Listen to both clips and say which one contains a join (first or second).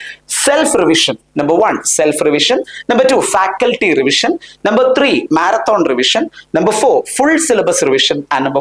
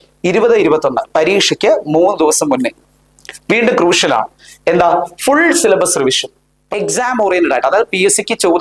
second